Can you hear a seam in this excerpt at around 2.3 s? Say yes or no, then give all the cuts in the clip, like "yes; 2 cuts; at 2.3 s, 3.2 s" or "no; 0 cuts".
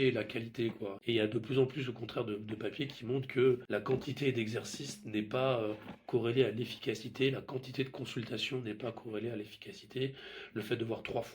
no; 2 cuts; at 0.9 s, 3.6 s